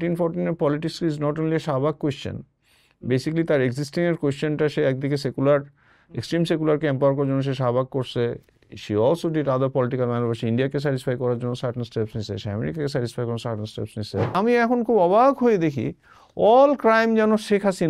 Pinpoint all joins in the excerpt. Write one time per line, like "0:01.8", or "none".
0:14.3